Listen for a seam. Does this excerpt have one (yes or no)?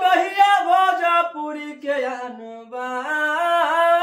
no